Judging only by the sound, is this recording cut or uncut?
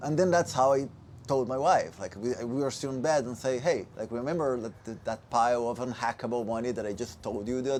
uncut